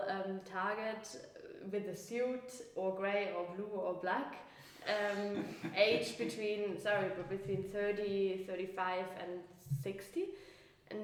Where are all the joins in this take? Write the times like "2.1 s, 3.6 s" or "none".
none